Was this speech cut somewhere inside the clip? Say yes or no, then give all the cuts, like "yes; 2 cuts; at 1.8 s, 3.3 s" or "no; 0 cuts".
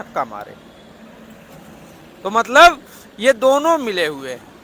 no; 0 cuts